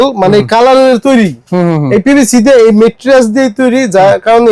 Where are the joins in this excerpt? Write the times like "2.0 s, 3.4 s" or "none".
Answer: none